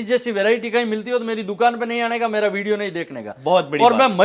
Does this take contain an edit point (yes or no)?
no